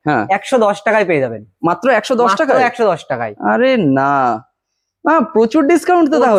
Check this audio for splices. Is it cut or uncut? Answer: uncut